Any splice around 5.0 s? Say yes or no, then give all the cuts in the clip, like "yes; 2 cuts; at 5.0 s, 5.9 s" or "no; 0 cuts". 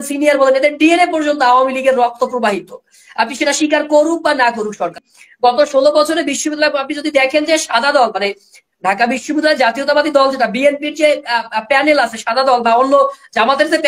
yes; 1 cut; at 5.0 s